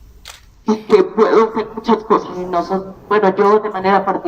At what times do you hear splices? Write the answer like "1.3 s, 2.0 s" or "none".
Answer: 2.6 s